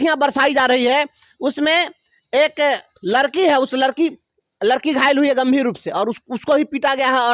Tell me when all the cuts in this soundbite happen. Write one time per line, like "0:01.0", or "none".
none